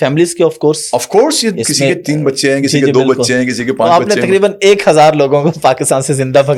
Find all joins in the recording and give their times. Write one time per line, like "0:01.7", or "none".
none